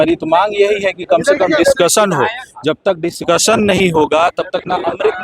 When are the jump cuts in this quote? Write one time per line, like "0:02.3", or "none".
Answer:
none